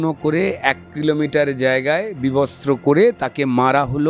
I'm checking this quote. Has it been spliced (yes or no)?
no